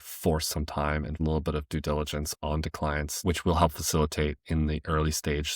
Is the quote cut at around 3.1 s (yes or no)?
yes